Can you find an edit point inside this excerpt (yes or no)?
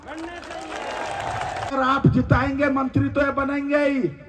yes